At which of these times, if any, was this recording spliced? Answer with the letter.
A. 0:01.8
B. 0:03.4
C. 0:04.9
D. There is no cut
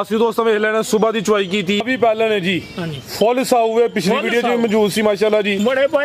A